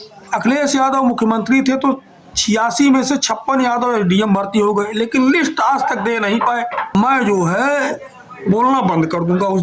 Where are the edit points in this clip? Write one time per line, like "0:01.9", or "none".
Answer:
0:06.9